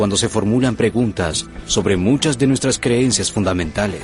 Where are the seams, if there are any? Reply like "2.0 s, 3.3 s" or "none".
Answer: none